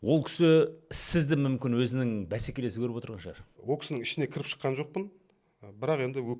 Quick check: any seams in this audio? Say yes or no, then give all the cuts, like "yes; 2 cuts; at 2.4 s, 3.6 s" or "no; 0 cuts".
yes; 1 cut; at 3.5 s